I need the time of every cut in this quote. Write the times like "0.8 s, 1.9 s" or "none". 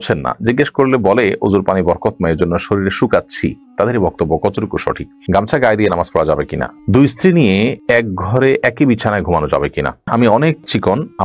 5.2 s, 6.7 s, 10.0 s